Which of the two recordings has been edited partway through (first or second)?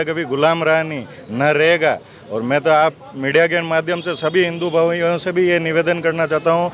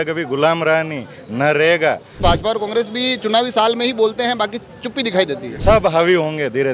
second